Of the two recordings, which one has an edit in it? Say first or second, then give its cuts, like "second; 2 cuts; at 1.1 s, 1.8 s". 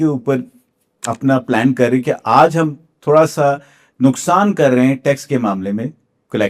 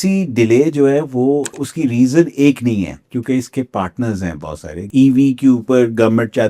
second; 2 cuts; at 1.6 s, 4.8 s